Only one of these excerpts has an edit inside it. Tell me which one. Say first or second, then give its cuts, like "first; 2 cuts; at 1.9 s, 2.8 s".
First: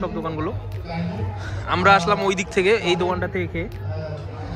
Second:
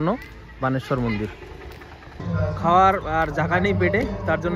second; 1 cut; at 2.2 s